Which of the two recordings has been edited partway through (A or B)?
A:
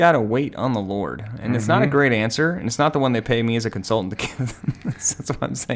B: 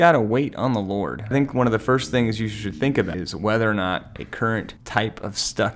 B